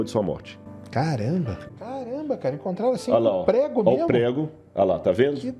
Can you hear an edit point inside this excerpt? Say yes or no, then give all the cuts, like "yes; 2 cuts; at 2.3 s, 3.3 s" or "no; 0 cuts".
yes; 1 cut; at 1.4 s